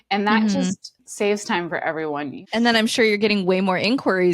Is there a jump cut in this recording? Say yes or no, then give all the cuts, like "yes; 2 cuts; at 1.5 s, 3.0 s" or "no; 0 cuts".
yes; 2 cuts; at 0.9 s, 2.4 s